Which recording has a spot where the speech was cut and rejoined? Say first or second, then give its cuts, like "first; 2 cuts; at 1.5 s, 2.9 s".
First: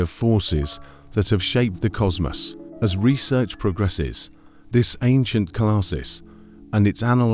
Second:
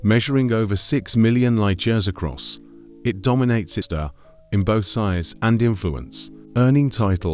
second; 1 cut; at 3.9 s